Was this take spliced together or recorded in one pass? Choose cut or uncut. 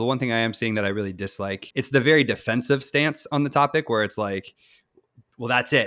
cut